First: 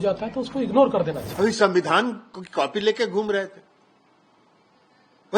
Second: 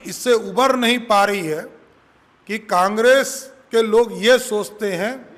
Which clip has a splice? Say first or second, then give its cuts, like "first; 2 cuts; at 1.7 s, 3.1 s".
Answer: first; 1 cut; at 1.2 s